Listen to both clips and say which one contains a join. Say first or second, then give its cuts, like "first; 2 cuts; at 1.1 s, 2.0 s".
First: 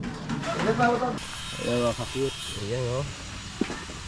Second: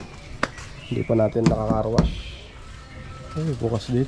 first; 1 cut; at 1.2 s